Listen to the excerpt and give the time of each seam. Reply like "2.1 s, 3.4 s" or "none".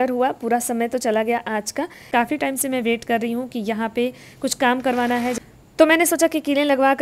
2.1 s, 5.4 s